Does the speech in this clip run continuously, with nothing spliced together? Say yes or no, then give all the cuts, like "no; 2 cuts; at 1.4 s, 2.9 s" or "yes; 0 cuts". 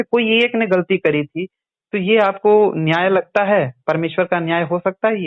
yes; 0 cuts